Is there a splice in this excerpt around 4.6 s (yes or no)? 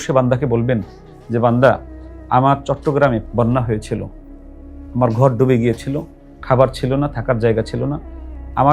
no